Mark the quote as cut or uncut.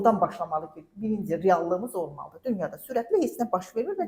uncut